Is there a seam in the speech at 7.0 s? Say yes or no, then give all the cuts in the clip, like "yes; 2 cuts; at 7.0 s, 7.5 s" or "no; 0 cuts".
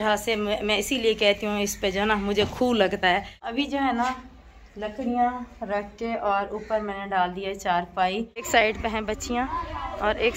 no; 2 cuts; at 3.0 s, 8.5 s